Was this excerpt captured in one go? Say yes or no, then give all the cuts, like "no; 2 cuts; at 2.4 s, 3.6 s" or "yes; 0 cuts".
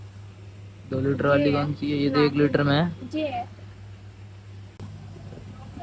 no; 1 cut; at 4.8 s